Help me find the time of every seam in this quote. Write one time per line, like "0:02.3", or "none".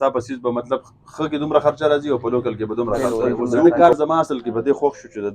0:03.7